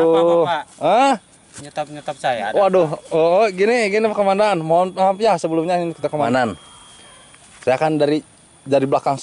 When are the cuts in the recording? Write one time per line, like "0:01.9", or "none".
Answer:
0:06.2